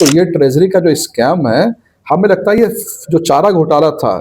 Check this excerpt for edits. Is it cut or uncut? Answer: cut